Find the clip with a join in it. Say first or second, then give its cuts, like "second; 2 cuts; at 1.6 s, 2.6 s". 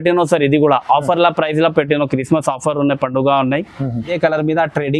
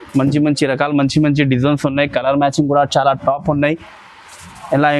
first; 1 cut; at 4.1 s